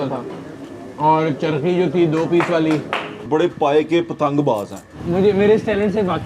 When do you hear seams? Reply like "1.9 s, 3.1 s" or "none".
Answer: 3.1 s, 5.0 s